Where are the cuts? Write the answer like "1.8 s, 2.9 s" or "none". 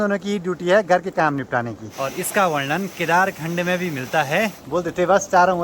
1.8 s, 4.6 s